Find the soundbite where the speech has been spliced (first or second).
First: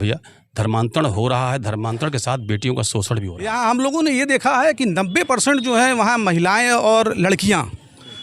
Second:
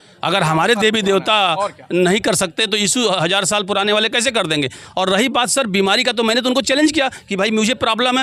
first